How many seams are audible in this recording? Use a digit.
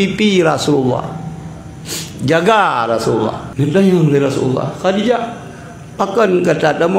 1